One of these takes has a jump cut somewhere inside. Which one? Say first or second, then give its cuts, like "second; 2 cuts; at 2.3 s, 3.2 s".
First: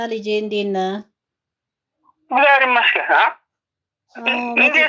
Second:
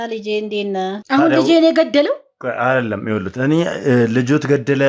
second; 1 cut; at 1.0 s